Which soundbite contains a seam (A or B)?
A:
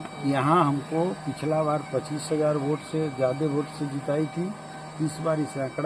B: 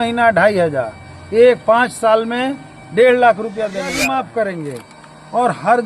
B